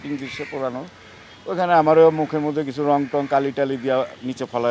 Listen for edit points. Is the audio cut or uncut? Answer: uncut